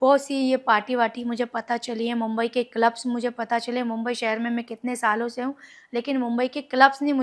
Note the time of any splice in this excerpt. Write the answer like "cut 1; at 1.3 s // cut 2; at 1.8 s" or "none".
none